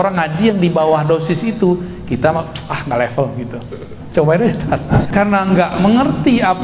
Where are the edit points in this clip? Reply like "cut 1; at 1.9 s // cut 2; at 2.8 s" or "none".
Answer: cut 1; at 4.9 s